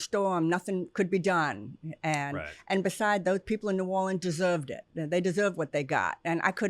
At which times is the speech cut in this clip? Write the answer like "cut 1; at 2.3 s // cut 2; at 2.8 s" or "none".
none